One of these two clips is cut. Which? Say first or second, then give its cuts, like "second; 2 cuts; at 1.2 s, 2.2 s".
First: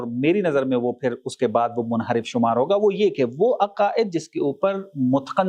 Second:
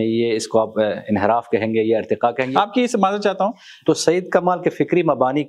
second; 2 cuts; at 2.5 s, 3.7 s